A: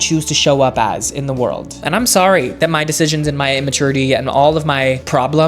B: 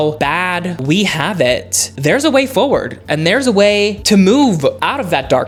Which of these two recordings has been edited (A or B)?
A